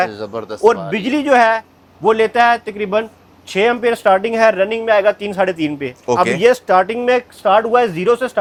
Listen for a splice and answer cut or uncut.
uncut